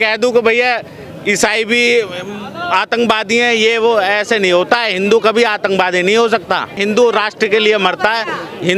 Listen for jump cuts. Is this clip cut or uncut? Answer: uncut